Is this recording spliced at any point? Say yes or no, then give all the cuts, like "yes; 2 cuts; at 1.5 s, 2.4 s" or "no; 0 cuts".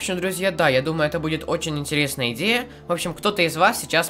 no; 0 cuts